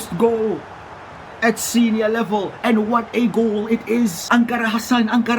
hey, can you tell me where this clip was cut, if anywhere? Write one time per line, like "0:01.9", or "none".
0:04.2